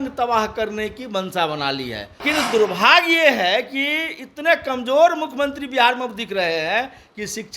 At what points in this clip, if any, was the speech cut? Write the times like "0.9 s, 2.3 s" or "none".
2.2 s